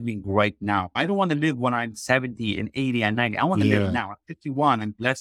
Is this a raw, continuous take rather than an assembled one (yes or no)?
no